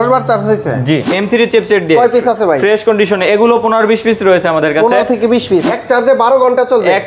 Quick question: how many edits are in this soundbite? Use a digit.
2